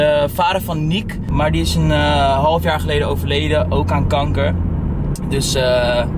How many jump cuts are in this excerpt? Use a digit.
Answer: 1